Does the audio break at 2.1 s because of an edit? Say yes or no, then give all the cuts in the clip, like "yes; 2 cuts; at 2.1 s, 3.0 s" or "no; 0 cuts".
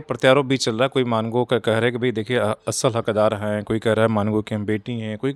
no; 0 cuts